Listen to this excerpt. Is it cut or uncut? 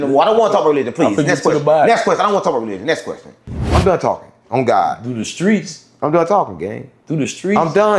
cut